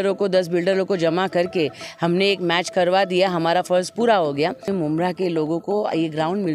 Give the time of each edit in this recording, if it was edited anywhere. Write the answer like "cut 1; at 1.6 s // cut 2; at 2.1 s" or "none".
cut 1; at 4.7 s